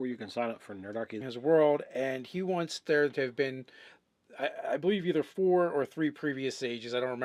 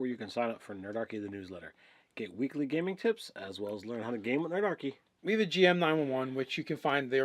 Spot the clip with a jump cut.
second; 1 cut; at 1.2 s

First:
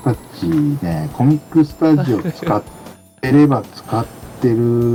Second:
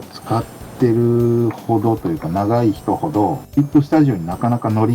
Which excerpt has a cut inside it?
second; 1 cut; at 3.4 s

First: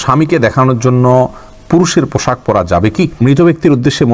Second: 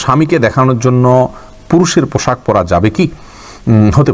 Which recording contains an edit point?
first; 1 cut; at 3.2 s

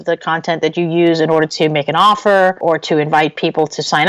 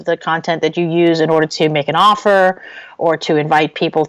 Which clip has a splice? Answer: first; 1 cut; at 2.6 s

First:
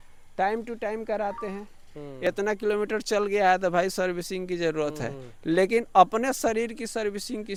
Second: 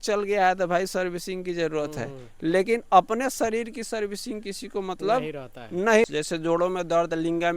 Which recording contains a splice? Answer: second; 1 cut; at 6.0 s

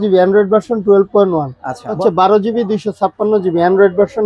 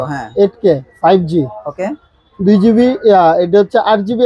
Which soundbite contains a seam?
first; 1 cut; at 2.0 s

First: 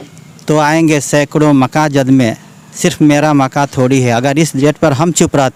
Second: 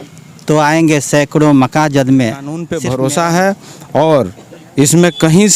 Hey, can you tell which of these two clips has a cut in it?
second; 1 cut; at 2.7 s

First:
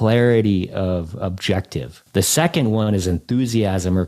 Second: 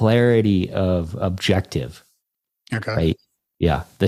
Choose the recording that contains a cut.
first; 1 cut; at 2.0 s

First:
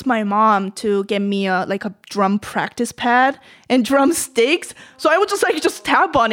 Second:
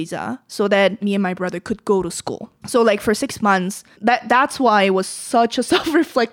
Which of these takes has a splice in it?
second; 3 cuts; at 1.0 s, 2.5 s, 3.8 s

